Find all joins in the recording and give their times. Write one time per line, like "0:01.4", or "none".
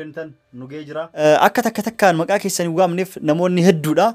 0:01.2